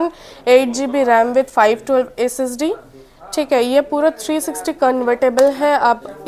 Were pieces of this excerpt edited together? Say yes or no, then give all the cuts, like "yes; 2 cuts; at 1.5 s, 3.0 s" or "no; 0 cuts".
no; 0 cuts